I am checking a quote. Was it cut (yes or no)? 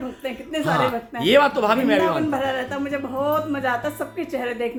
no